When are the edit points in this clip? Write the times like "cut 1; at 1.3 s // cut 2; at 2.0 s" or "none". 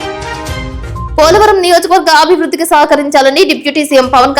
cut 1; at 1.1 s